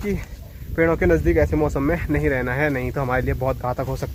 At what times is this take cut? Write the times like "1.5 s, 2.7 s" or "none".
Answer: none